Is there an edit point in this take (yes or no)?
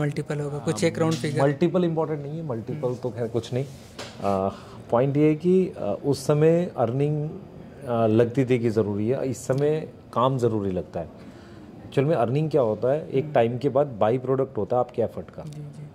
no